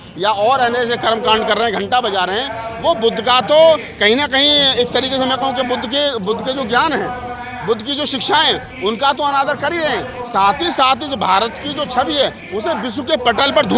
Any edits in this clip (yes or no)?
no